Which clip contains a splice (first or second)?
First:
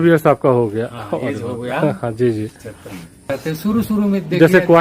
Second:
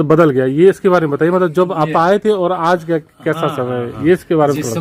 first